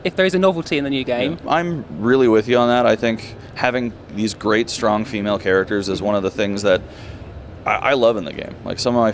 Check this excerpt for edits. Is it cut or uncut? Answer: cut